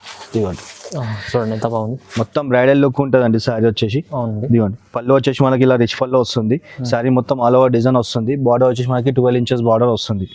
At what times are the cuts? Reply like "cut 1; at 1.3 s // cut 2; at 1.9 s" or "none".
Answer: none